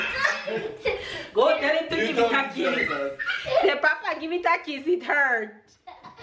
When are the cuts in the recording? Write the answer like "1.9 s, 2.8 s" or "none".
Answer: none